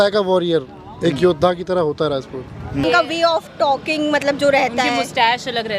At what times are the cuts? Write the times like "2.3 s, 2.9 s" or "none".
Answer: 2.8 s